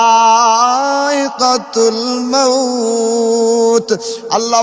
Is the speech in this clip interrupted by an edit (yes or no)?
no